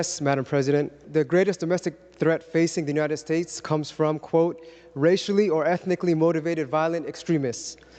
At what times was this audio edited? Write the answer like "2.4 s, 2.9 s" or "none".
1.0 s